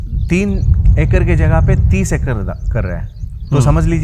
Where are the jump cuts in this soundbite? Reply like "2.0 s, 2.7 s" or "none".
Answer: none